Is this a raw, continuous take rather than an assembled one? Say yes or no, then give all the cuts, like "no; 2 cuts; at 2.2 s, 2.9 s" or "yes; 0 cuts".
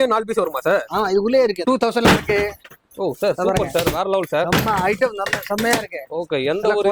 no; 1 cut; at 1.6 s